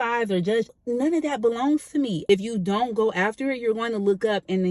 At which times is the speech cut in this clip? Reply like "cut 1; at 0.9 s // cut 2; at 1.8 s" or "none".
cut 1; at 0.7 s // cut 2; at 2.2 s